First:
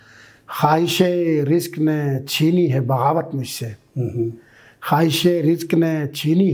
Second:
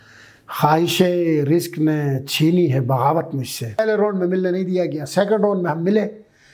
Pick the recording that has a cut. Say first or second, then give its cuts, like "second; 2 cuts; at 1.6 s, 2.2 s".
second; 1 cut; at 3.8 s